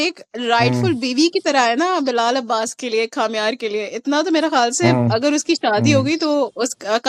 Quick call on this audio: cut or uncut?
uncut